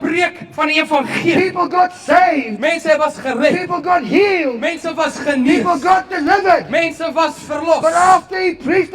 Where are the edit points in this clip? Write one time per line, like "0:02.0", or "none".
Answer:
none